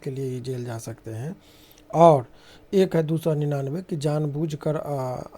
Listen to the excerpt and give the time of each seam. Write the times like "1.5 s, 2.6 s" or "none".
none